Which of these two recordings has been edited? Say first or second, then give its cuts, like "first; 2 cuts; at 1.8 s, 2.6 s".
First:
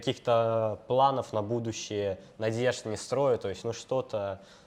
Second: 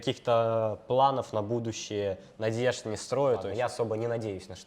second; 1 cut; at 3.5 s